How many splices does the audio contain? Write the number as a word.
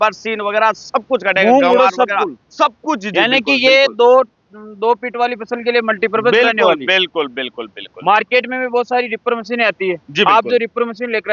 zero